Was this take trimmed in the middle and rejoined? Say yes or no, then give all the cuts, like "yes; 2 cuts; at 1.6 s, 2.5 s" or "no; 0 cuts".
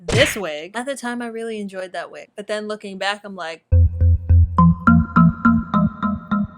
yes; 1 cut; at 2.3 s